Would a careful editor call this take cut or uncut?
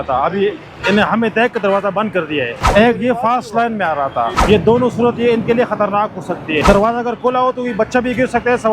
cut